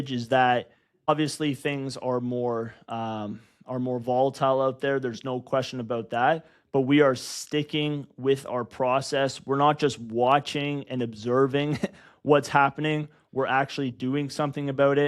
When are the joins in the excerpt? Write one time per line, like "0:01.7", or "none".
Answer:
0:01.1